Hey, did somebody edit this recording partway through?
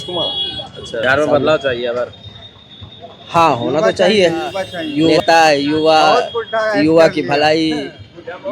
yes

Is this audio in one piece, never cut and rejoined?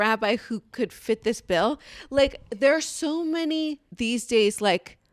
no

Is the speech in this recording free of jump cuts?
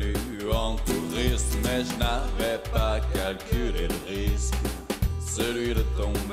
yes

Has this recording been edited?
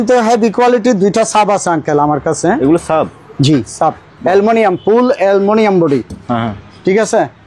no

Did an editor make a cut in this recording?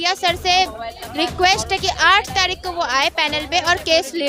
no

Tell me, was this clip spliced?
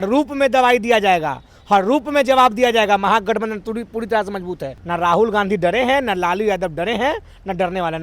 yes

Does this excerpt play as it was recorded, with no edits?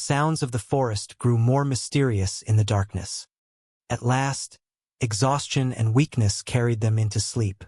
yes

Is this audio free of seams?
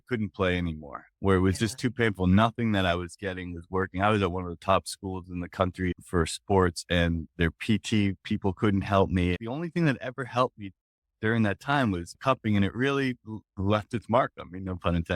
no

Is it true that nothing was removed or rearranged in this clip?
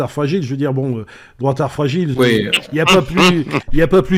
yes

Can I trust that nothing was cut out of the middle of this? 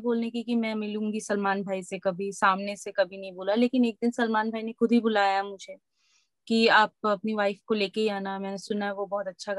yes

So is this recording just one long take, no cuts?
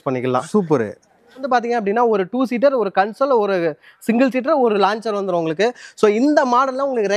no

